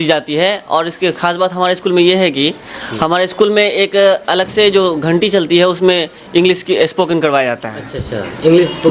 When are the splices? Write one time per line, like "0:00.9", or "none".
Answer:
none